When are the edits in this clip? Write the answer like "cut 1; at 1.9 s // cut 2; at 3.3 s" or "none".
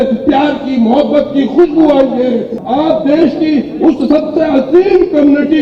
cut 1; at 2.5 s